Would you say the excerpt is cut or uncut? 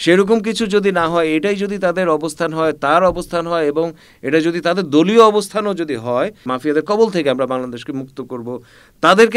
cut